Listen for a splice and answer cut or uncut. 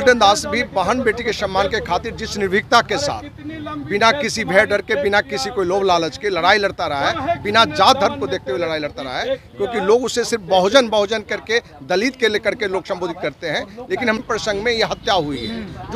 cut